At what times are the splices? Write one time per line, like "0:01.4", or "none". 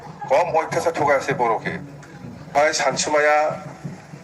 0:02.5